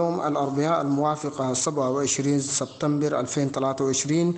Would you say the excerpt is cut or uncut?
uncut